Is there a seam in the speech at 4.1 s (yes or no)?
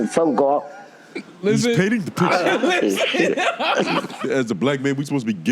yes